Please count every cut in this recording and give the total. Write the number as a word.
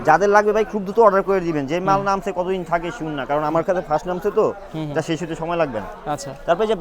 zero